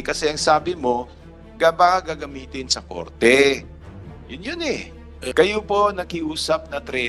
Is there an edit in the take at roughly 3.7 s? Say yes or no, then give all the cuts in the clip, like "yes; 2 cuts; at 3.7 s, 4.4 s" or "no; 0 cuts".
no; 1 cut; at 5.3 s